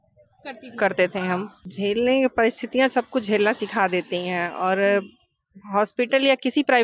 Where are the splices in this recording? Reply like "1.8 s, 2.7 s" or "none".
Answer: 1.6 s